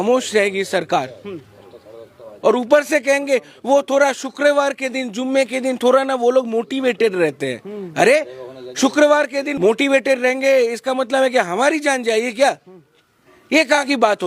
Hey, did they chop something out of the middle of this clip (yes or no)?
no